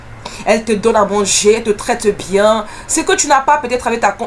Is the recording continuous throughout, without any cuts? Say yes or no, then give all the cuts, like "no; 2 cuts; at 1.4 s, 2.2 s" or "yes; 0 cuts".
yes; 0 cuts